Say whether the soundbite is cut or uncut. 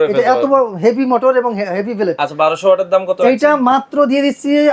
uncut